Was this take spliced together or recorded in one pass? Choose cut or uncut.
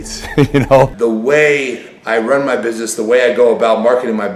cut